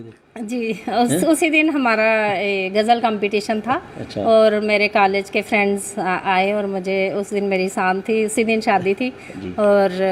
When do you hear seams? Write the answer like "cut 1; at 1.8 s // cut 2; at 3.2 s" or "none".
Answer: none